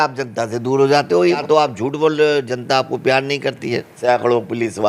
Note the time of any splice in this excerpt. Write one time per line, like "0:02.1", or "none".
0:01.4
0:03.9